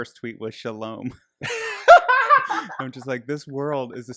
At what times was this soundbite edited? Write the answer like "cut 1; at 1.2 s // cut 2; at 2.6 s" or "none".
none